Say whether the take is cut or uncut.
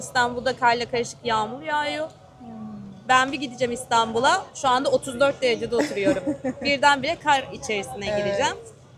uncut